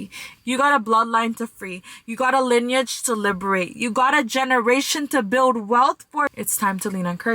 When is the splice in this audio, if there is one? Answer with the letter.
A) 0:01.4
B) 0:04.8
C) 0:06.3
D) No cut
C